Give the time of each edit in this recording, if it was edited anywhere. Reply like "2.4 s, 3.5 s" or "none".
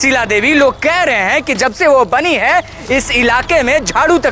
none